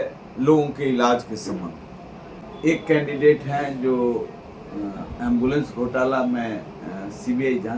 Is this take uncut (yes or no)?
no